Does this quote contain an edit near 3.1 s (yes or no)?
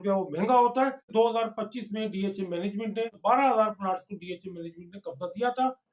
yes